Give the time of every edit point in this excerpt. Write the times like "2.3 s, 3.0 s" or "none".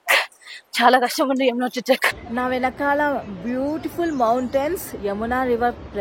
2.2 s

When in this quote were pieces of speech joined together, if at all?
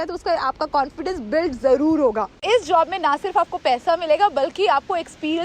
2.4 s

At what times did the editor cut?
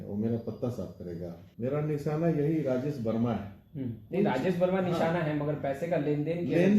1.4 s

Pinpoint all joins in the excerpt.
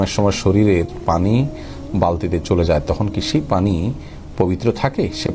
none

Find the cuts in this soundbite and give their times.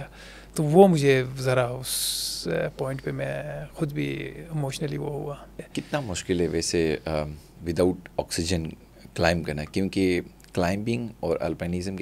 5.6 s

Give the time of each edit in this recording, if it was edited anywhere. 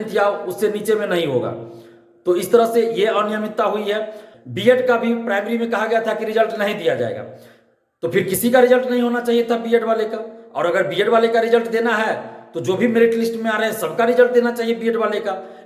4.2 s

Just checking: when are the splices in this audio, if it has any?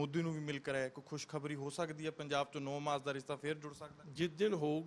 none

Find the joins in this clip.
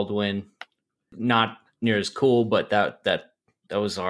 1.0 s

